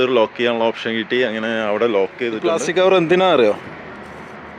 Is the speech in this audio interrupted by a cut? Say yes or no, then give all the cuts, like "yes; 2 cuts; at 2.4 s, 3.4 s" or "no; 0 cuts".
yes; 1 cut; at 2.4 s